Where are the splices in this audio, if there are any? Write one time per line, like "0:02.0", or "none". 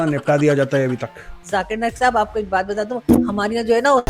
0:01.3